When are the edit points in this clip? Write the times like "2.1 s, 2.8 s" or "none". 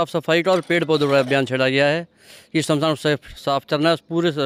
none